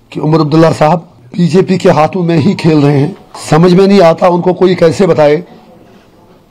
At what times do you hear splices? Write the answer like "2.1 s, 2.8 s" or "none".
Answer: 1.2 s, 3.3 s